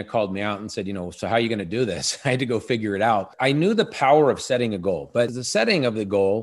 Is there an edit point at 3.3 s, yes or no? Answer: yes